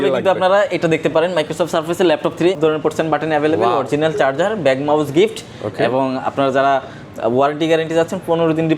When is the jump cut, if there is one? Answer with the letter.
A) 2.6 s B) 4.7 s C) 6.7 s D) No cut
A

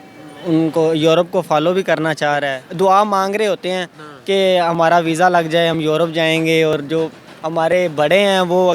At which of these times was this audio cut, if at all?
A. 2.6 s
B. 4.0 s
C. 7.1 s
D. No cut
A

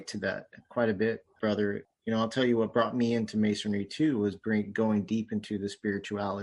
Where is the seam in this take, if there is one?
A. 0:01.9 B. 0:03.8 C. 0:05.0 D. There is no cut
A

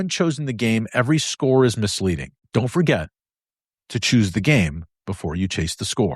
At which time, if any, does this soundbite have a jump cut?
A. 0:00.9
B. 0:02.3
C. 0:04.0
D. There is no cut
B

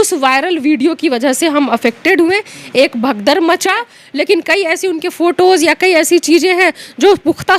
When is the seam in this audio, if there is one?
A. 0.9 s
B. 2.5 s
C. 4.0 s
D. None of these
C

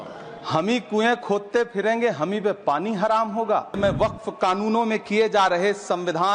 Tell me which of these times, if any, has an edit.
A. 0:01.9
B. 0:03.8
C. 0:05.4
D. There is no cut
B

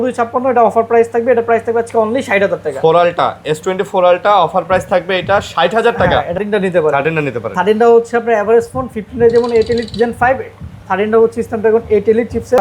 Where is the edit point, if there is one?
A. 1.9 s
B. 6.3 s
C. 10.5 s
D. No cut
B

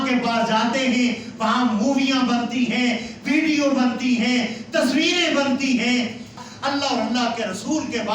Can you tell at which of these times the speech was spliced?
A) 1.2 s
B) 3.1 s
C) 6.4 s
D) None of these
C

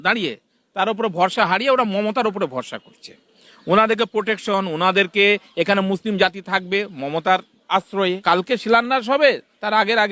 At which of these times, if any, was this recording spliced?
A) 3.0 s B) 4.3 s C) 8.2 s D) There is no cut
C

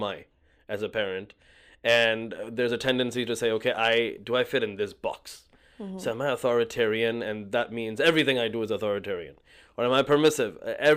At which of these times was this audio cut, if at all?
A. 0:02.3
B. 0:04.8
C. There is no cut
C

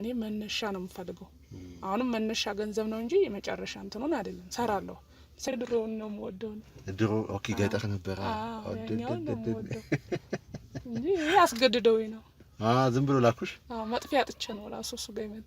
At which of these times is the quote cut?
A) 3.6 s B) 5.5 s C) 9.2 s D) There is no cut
B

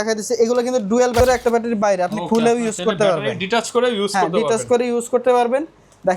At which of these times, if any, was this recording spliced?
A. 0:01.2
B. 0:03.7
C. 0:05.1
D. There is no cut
A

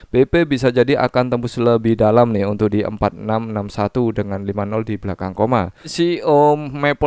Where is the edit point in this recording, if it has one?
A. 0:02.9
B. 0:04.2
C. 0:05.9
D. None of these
C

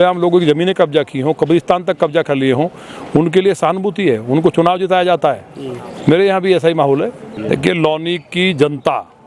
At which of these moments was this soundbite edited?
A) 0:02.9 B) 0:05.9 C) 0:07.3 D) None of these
C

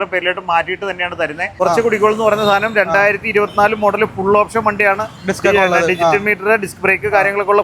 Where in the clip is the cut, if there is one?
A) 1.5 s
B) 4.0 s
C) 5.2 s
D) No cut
A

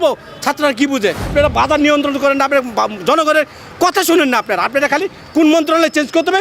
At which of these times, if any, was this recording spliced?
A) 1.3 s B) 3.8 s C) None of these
A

